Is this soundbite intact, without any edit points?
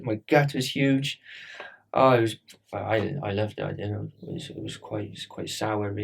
no; 1 cut; at 4.1 s

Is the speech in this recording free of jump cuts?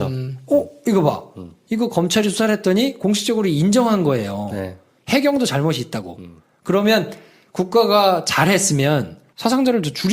no; 1 cut; at 1.3 s

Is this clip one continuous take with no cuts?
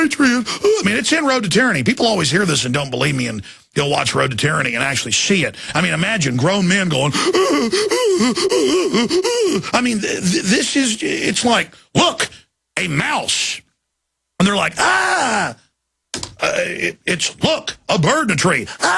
yes; 0 cuts

